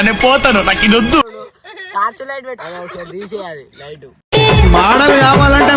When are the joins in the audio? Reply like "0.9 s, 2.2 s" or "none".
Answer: 2.6 s